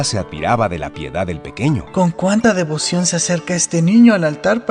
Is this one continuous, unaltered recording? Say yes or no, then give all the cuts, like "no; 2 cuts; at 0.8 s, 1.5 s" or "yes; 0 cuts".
yes; 0 cuts